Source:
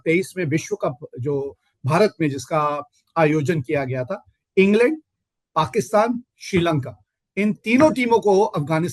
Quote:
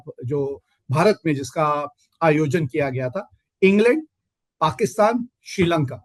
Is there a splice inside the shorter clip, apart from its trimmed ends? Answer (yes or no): no